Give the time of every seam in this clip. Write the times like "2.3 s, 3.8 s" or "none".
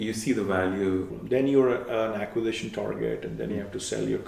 1.1 s